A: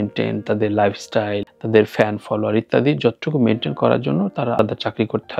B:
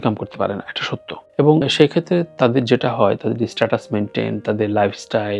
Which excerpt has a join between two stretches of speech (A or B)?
B